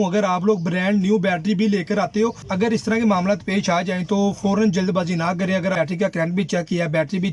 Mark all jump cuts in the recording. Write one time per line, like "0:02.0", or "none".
0:02.4
0:05.6